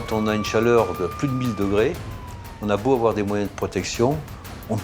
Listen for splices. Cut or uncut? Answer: uncut